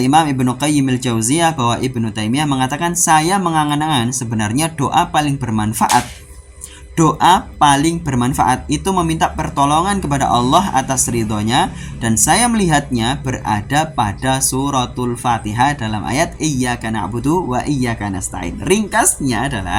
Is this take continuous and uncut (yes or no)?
yes